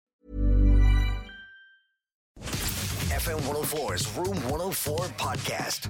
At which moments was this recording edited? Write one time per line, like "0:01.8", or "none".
0:02.4